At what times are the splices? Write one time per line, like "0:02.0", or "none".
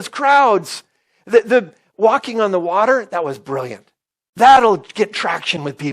0:04.2